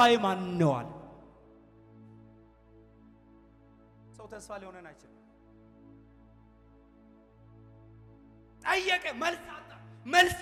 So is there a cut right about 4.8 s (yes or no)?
no